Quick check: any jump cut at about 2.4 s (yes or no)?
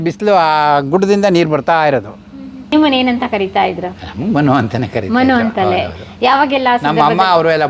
yes